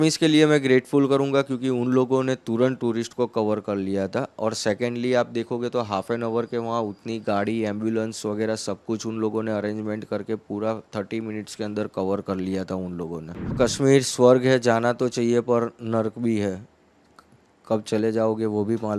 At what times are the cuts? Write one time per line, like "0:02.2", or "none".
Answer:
0:13.6